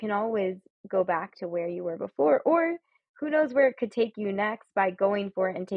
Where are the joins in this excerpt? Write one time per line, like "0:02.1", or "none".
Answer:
none